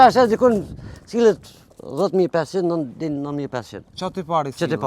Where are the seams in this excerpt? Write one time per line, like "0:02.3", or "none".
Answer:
none